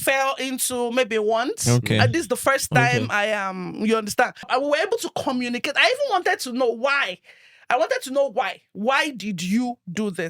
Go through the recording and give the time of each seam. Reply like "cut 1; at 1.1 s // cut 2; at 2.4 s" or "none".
cut 1; at 4.5 s